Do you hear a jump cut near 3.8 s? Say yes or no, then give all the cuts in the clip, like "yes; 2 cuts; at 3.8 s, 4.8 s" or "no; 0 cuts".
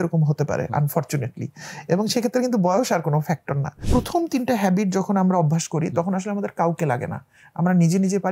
yes; 1 cut; at 3.8 s